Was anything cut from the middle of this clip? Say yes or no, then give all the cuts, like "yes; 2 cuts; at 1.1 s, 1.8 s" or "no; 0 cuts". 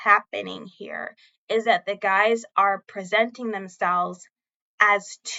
no; 0 cuts